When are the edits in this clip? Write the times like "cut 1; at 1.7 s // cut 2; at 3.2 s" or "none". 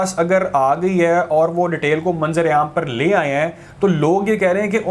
none